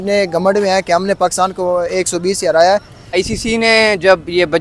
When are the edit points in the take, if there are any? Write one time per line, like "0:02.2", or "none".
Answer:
0:03.0